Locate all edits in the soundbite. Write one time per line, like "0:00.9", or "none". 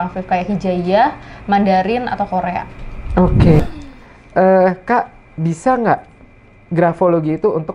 0:03.6